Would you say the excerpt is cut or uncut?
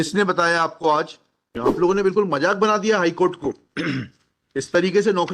cut